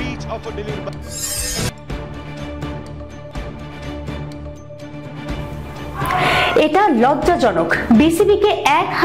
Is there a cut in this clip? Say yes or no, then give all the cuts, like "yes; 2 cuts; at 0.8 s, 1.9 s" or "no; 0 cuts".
no; 0 cuts